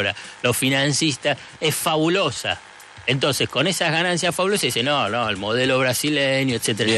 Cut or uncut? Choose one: uncut